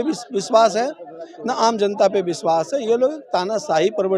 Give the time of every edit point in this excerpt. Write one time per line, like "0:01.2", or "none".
none